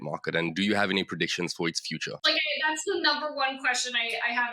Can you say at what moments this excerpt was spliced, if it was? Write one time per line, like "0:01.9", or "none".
0:02.2